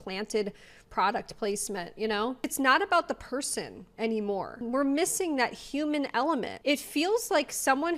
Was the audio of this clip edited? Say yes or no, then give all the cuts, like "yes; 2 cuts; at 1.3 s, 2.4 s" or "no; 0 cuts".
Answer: yes; 2 cuts; at 2.4 s, 6.5 s